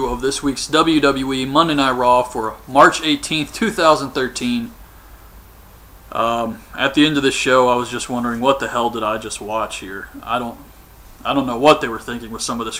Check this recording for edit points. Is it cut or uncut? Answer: uncut